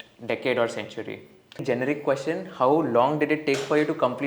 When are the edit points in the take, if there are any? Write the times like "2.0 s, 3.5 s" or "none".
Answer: 1.6 s